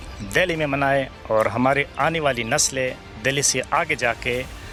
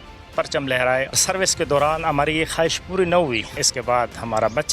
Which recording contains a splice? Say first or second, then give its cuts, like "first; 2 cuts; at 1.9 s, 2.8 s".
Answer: second; 2 cuts; at 1.2 s, 3.7 s